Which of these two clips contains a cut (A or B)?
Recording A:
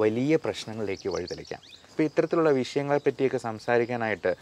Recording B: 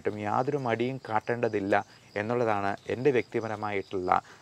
A